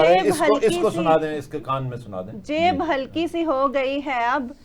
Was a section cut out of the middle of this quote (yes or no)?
no